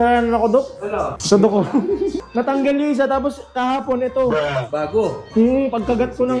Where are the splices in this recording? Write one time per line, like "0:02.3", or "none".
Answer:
0:01.2
0:02.2